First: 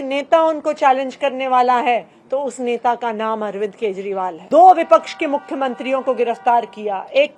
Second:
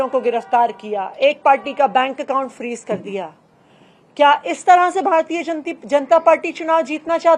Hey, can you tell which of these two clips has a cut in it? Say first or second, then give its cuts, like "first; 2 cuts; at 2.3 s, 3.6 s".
first; 1 cut; at 4.4 s